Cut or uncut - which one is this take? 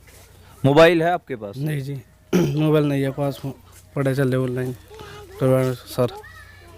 uncut